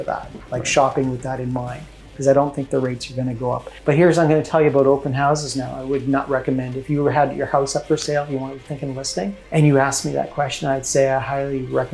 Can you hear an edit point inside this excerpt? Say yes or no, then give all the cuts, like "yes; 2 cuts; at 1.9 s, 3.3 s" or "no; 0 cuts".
yes; 2 cuts; at 3.7 s, 9.4 s